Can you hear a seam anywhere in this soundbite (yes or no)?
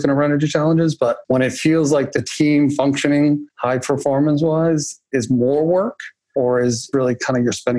yes